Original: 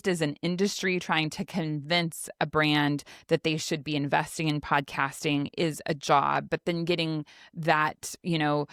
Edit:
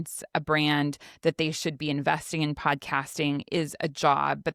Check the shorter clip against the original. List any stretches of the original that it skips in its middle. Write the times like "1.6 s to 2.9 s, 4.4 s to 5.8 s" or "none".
none